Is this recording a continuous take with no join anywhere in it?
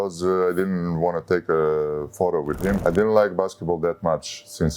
no; 1 cut; at 2.8 s

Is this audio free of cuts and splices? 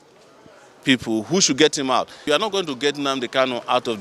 no; 1 cut; at 2.3 s

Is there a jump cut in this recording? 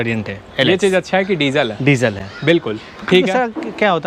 no; 0 cuts

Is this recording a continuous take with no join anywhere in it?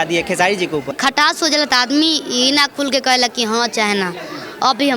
no; 1 cut; at 0.9 s

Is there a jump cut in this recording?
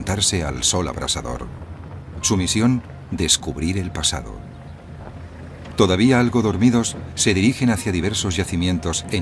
yes; 1 cut; at 4.3 s

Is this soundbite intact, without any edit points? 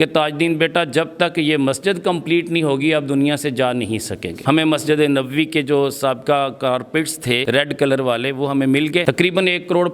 no; 2 cuts; at 4.4 s, 9.0 s

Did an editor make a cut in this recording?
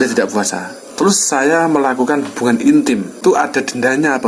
yes; 1 cut; at 3.2 s

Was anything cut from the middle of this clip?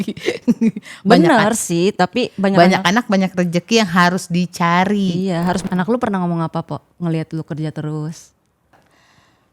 yes; 2 cuts; at 5.6 s, 8.7 s

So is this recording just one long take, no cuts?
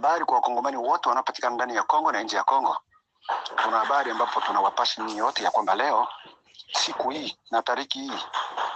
yes; 0 cuts

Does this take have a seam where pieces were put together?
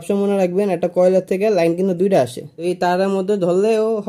yes; 1 cut; at 2.5 s

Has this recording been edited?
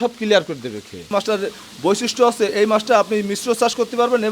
yes; 1 cut; at 1.1 s

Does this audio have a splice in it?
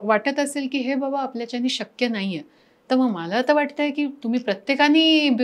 no; 0 cuts

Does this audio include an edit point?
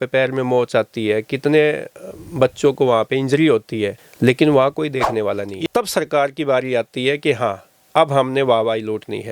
yes; 1 cut; at 5.5 s

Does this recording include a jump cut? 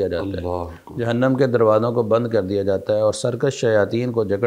no; 0 cuts

